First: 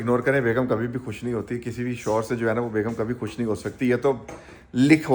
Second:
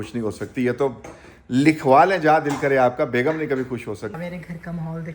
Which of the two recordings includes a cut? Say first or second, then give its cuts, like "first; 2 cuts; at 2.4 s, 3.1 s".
second; 1 cut; at 4.1 s